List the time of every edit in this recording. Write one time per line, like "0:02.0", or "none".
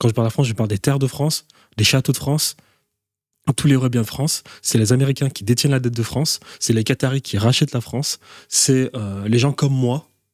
none